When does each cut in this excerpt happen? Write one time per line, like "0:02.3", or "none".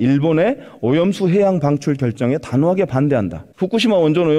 0:03.4